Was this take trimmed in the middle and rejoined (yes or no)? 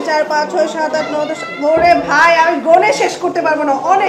no